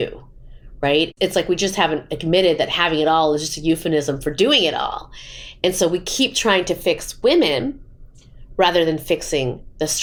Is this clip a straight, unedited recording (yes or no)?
yes